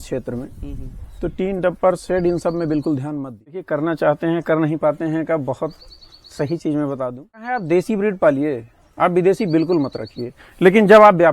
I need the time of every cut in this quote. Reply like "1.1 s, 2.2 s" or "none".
3.7 s, 7.6 s